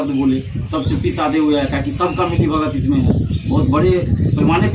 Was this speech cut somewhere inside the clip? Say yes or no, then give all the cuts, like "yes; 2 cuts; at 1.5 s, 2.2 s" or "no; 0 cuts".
no; 0 cuts